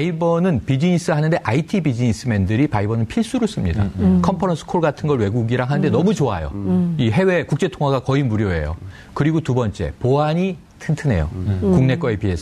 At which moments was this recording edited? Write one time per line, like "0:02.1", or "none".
0:11.0

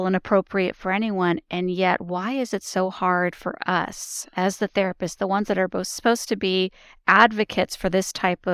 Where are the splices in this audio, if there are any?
none

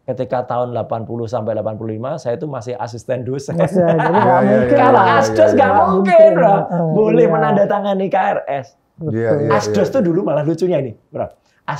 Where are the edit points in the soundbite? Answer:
none

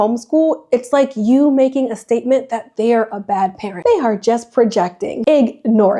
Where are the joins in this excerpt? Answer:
0:03.7
0:05.1

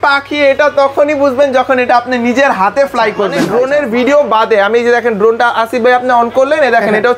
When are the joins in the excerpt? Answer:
0:03.5

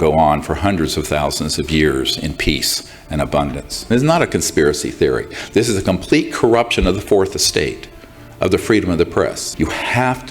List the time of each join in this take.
0:03.8
0:09.4

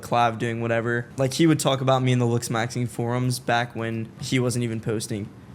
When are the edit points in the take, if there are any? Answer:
0:01.1
0:04.2

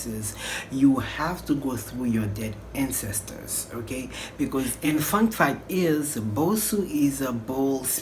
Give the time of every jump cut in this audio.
0:04.8

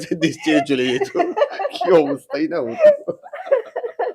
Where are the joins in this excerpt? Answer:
none

